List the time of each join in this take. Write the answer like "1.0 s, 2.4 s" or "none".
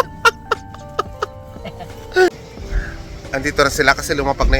2.3 s